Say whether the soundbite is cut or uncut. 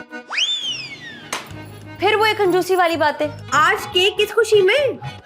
cut